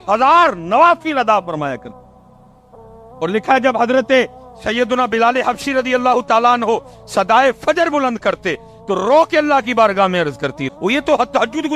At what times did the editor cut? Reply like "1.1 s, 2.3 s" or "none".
10.6 s